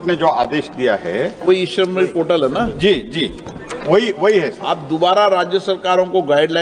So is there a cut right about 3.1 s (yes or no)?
no